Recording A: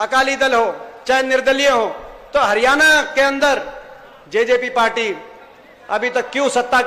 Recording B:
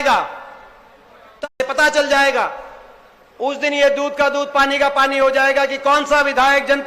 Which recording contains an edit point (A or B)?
B